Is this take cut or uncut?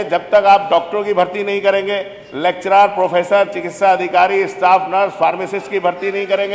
uncut